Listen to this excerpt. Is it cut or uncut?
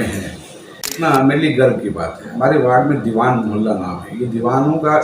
cut